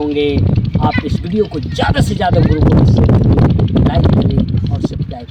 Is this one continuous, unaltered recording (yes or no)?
yes